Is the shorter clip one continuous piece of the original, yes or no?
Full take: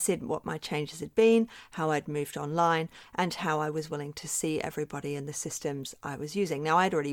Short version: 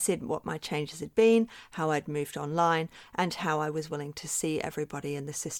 yes